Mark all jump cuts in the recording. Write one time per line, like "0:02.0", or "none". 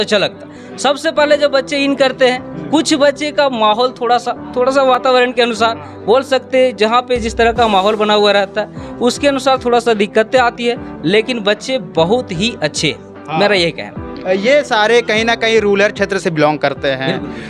none